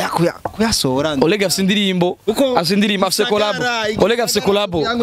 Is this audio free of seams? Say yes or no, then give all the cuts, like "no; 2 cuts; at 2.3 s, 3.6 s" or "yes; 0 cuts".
yes; 0 cuts